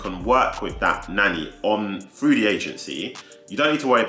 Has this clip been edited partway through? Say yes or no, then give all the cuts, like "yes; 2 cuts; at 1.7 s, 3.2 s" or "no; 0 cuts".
no; 0 cuts